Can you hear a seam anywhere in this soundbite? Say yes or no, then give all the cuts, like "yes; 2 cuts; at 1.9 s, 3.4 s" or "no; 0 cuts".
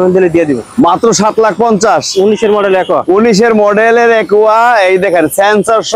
no; 0 cuts